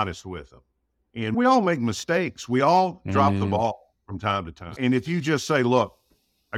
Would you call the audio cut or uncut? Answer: cut